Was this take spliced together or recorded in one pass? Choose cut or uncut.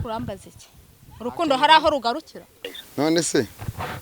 cut